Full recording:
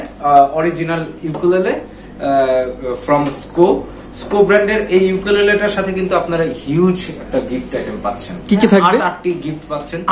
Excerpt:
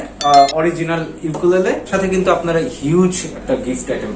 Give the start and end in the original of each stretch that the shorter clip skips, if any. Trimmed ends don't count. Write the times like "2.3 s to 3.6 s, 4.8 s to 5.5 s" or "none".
1.9 s to 5.7 s